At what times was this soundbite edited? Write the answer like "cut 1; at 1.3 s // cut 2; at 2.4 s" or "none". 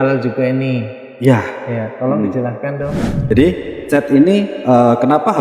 cut 1; at 3.1 s